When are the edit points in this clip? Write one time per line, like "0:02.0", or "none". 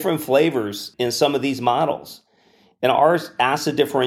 none